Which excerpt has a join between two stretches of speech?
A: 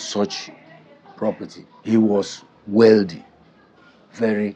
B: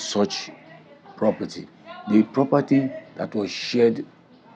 A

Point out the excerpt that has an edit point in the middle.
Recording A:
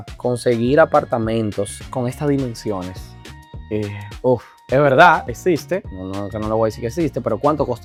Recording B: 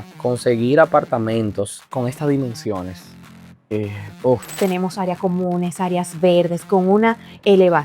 B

